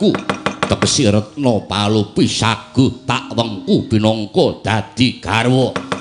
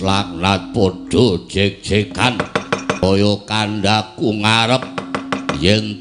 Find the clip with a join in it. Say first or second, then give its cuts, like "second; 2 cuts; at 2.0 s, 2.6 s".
second; 1 cut; at 3.0 s